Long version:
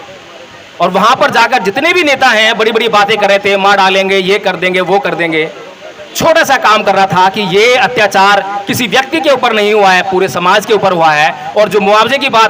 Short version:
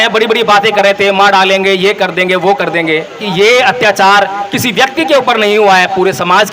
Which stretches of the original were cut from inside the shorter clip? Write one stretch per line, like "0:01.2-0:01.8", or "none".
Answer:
0:05.7-0:07.4